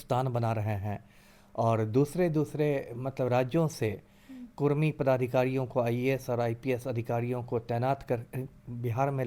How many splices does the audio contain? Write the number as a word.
zero